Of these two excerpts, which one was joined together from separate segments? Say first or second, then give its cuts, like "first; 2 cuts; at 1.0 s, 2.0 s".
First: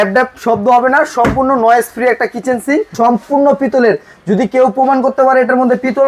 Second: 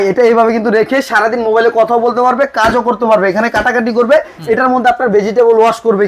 first; 1 cut; at 2.9 s